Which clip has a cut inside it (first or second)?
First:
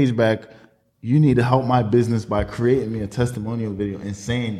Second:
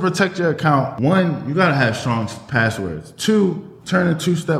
second